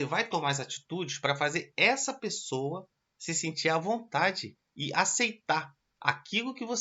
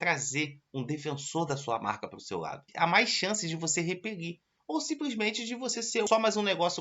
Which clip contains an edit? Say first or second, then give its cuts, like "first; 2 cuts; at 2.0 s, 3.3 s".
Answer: second; 2 cuts; at 2.6 s, 6.1 s